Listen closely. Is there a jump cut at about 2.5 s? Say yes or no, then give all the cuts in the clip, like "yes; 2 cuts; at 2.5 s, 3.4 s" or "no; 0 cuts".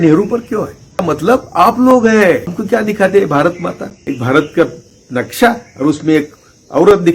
yes; 3 cuts; at 1.0 s, 2.5 s, 3.9 s